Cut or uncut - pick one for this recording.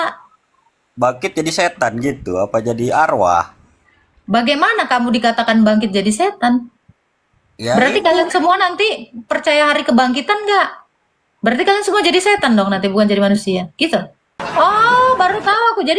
cut